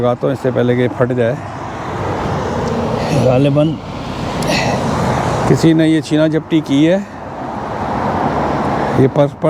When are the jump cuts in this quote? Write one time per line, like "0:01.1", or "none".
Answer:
none